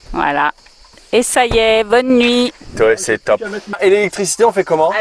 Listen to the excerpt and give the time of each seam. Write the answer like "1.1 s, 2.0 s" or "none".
3.8 s